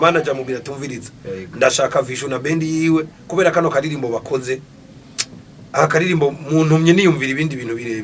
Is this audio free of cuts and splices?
yes; 0 cuts

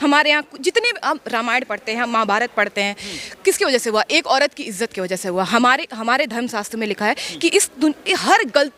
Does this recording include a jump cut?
no; 0 cuts

